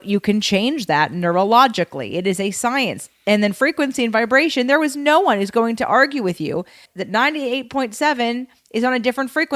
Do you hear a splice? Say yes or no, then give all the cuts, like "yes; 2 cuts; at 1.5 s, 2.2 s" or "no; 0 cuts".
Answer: yes; 1 cut; at 6.9 s